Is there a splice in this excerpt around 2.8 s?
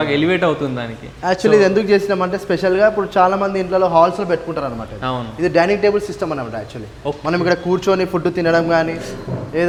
no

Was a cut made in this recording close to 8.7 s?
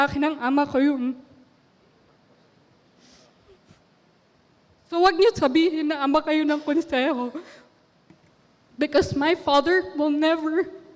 no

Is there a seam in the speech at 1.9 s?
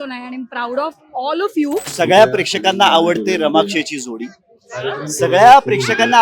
yes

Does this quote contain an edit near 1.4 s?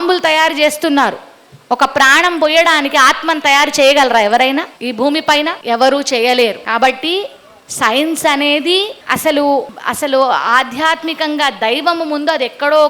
no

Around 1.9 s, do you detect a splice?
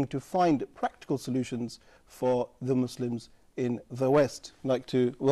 no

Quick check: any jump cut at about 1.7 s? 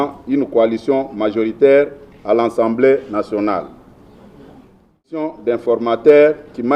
no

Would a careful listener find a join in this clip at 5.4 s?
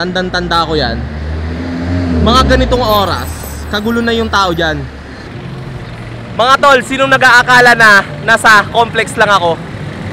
yes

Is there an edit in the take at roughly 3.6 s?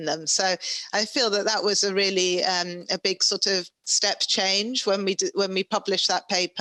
no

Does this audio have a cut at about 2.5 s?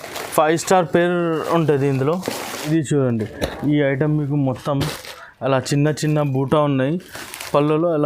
yes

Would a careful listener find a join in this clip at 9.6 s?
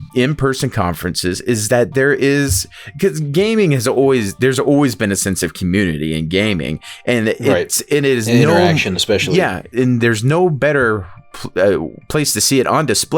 yes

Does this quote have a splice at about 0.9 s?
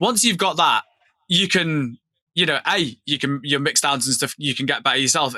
no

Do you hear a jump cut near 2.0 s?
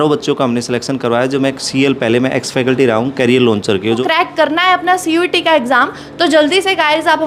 no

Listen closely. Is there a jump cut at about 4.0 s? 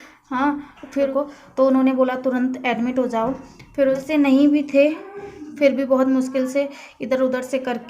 yes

